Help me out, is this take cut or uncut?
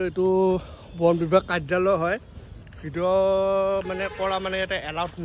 uncut